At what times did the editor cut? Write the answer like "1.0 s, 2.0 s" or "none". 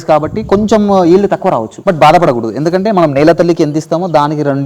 1.7 s